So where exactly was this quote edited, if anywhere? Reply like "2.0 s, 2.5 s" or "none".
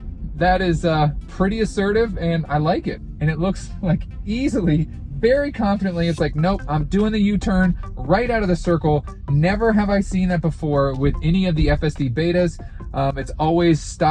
3.1 s